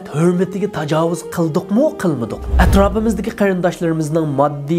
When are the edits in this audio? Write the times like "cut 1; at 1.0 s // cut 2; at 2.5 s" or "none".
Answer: cut 1; at 2.4 s